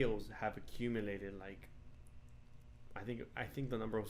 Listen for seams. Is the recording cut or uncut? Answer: uncut